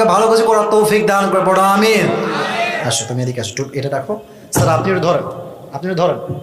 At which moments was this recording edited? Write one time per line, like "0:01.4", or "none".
0:02.7